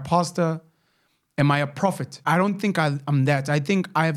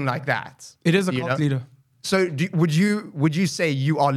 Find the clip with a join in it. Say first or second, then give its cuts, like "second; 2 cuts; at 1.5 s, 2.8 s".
first; 1 cut; at 2.2 s